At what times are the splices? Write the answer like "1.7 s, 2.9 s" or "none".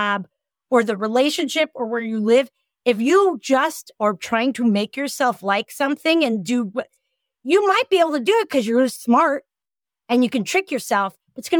none